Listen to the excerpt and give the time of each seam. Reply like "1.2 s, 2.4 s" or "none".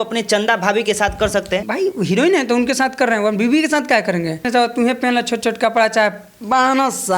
1.6 s, 4.4 s